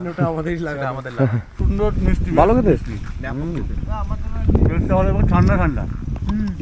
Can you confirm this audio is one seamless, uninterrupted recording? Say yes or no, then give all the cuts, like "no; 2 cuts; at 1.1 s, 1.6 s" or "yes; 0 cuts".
no; 1 cut; at 1.6 s